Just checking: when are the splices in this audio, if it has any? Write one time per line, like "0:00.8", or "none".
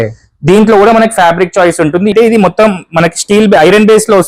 0:02.1